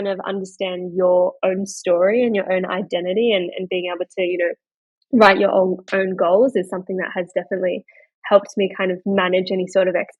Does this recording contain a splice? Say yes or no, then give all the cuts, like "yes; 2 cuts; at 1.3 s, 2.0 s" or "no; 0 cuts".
no; 0 cuts